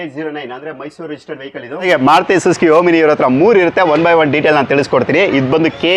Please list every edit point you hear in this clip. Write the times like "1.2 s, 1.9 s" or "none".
1.8 s